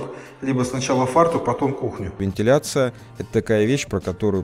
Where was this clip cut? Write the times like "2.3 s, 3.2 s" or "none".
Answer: 2.2 s